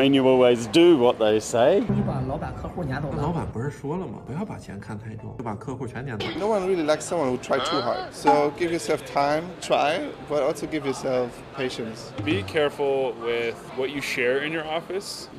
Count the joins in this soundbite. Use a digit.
0